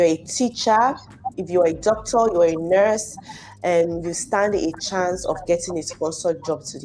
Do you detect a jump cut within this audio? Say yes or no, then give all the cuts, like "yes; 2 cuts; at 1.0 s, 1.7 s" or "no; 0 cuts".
no; 0 cuts